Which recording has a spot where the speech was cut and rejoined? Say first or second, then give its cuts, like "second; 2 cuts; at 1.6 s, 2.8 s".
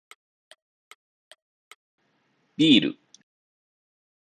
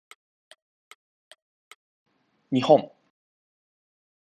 first; 1 cut; at 1.9 s